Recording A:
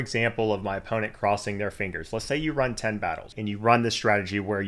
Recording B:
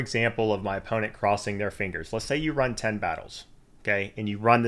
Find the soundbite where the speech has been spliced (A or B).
A